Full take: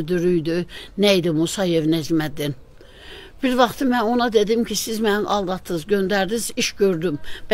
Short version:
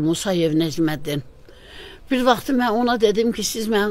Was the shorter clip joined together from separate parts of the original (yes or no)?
no